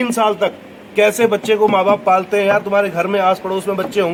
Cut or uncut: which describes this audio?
uncut